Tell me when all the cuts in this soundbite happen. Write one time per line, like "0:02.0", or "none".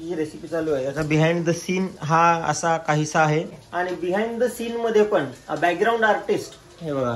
0:03.6